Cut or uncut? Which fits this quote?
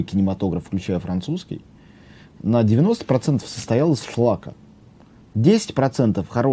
uncut